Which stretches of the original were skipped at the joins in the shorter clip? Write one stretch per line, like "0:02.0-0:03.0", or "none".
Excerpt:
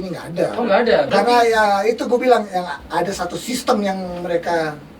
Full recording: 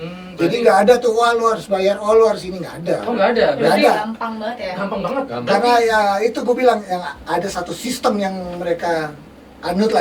0:03.6-0:05.4